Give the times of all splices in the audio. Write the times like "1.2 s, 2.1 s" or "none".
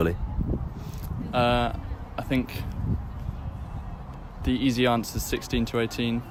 none